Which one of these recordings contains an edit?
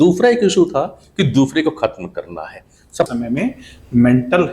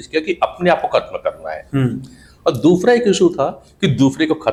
first; 1 cut; at 3.1 s

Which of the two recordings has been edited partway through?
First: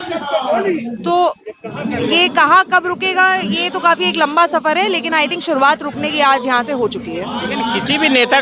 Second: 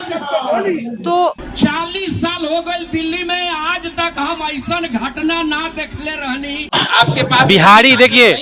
second; 2 cuts; at 1.5 s, 6.7 s

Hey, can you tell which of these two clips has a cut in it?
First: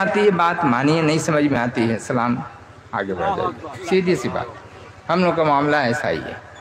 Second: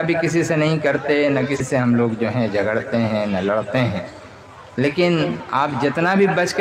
second; 1 cut; at 1.6 s

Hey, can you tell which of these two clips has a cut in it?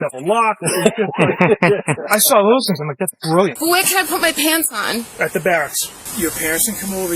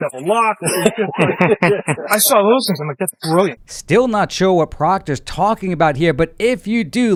first; 2 cuts; at 3.6 s, 6.1 s

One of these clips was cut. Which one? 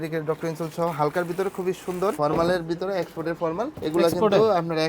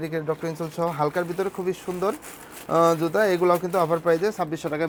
first; 2 cuts; at 2.2 s, 3.8 s

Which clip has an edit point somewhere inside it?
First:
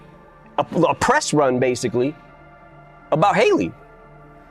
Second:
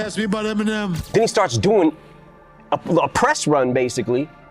second; 1 cut; at 1.0 s

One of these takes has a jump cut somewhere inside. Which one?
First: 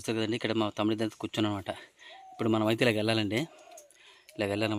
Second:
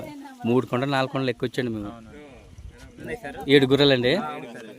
second; 1 cut; at 3.0 s

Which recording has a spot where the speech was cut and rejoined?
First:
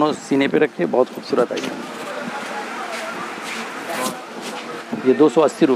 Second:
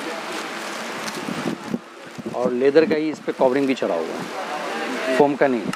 first; 1 cut; at 4.8 s

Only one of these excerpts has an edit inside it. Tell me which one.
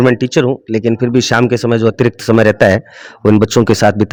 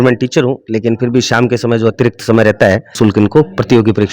second; 1 cut; at 2.9 s

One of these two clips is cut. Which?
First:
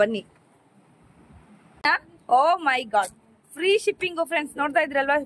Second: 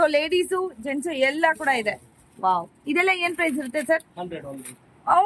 first; 1 cut; at 1.8 s

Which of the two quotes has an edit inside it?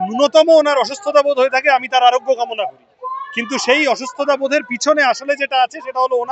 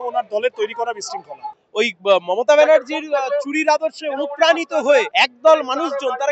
second; 2 cuts; at 1.6 s, 5.1 s

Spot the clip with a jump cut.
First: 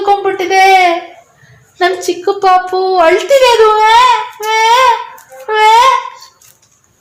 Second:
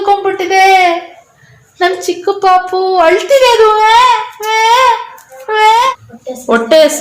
second; 1 cut; at 5.9 s

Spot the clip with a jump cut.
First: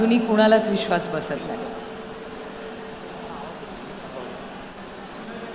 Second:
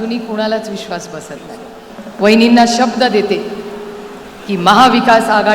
second; 1 cut; at 1.9 s

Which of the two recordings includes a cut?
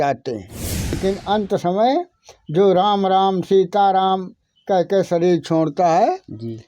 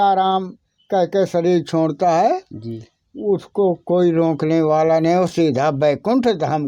first; 1 cut; at 1.0 s

